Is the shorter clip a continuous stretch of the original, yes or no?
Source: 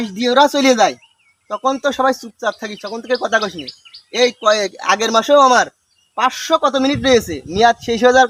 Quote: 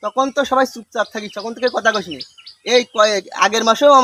yes